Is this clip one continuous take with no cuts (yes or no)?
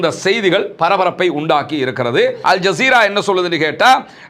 no